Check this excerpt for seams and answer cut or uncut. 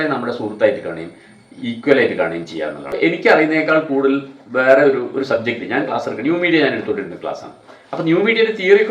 cut